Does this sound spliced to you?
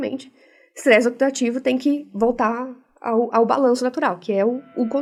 no; 0 cuts

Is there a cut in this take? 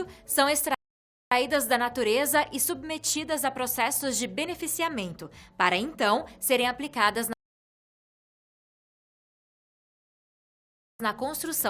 no; 0 cuts

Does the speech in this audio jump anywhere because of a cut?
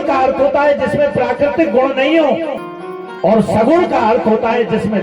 yes; 1 cut; at 2.7 s

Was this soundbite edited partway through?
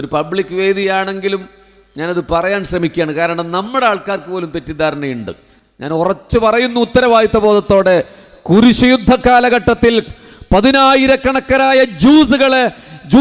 no; 0 cuts

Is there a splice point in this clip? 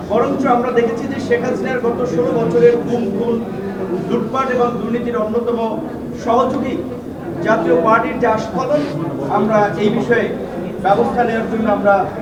no; 0 cuts

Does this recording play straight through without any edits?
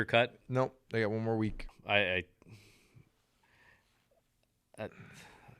no; 1 cut; at 1.7 s

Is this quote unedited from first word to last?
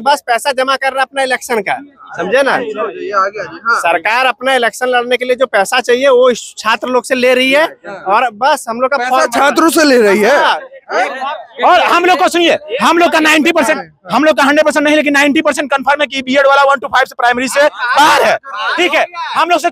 yes; 0 cuts

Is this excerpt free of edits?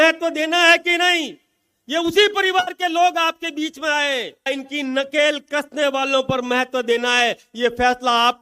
no; 1 cut; at 4.5 s

